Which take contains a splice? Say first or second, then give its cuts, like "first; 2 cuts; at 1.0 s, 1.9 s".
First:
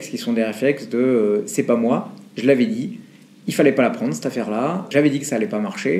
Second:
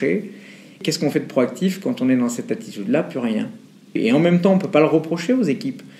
second; 1 cut; at 4.0 s